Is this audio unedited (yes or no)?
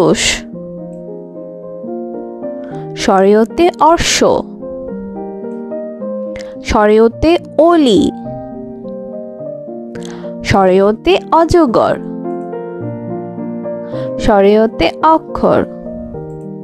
yes